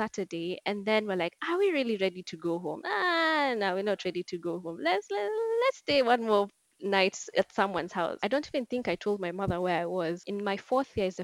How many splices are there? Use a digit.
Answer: 2